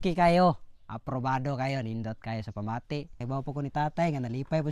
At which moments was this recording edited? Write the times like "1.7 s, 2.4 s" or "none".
3.2 s